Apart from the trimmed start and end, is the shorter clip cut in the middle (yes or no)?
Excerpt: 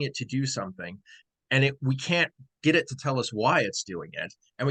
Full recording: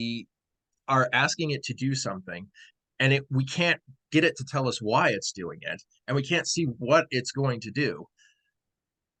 no